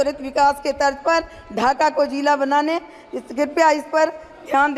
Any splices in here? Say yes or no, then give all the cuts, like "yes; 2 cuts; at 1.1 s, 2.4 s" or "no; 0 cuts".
no; 0 cuts